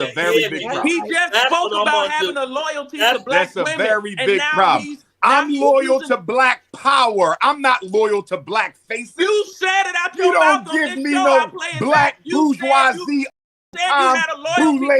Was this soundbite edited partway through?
no; 0 cuts

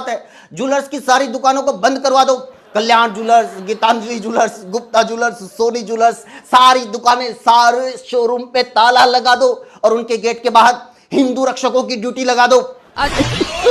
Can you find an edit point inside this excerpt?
yes; 1 cut; at 12.8 s

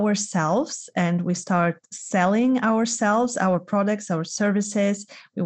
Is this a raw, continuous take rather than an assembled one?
yes; 0 cuts

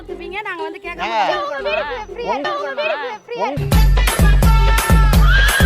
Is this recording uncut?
no; 1 cut; at 2.4 s

